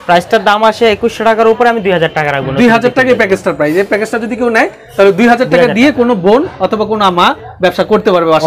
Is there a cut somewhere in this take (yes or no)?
no